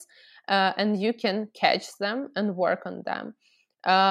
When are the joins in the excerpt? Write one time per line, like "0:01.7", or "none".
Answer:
none